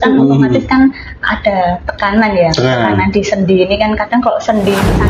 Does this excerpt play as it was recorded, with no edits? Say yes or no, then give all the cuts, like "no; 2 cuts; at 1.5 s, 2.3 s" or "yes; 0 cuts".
yes; 0 cuts